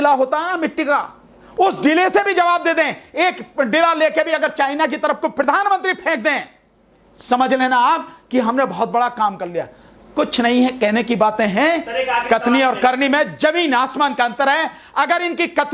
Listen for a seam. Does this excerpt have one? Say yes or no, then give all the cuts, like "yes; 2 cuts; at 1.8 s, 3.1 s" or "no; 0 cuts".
no; 0 cuts